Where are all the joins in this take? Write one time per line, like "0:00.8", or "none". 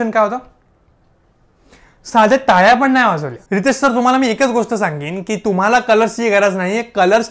0:03.3